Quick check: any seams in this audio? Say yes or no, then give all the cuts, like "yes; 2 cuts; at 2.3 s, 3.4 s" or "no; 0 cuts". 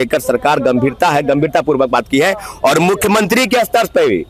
no; 0 cuts